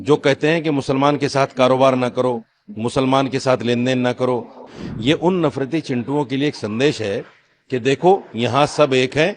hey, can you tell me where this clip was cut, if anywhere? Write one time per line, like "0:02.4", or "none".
0:04.6